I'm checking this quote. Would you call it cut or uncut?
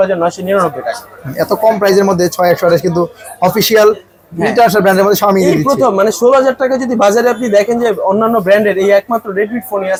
uncut